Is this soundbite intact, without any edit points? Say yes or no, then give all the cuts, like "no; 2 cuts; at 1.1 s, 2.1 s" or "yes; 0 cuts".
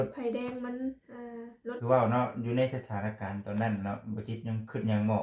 no; 1 cut; at 1.8 s